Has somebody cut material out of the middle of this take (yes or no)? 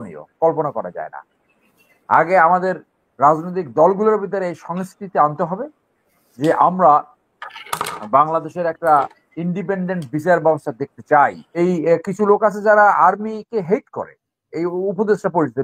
yes